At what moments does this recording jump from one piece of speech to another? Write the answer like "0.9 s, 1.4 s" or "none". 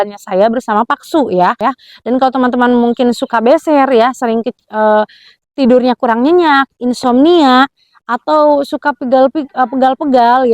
1.6 s